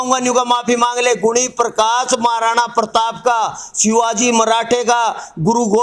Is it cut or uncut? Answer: uncut